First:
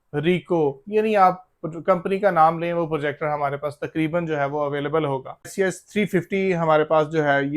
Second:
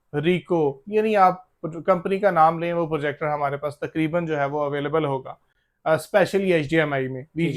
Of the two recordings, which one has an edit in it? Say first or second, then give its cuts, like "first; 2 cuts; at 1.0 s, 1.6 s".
first; 1 cut; at 5.4 s